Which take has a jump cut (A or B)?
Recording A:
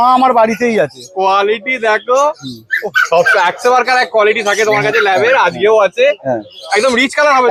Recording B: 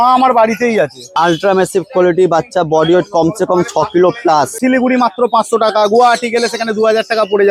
B